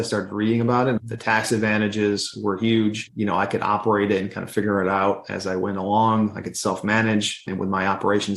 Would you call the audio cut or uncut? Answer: cut